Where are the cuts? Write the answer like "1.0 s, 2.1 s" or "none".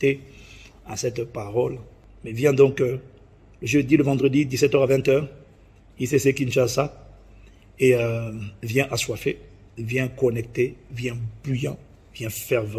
none